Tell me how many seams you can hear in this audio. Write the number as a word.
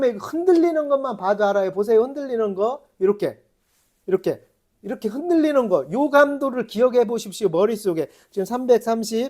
zero